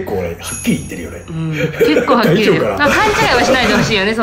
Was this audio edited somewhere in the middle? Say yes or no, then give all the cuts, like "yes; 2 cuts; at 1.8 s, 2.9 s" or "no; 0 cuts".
no; 0 cuts